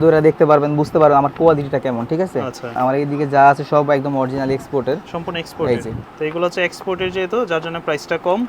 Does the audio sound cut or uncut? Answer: cut